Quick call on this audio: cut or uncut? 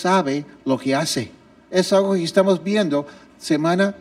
uncut